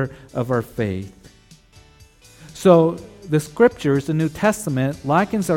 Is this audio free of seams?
yes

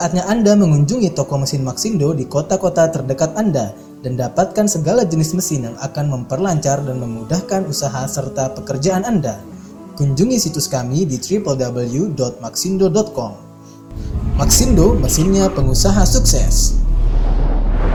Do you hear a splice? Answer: no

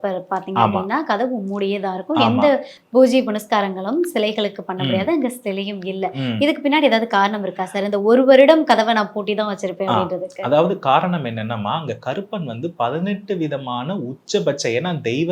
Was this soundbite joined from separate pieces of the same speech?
no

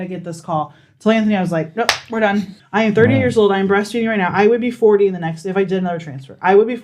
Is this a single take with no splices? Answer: no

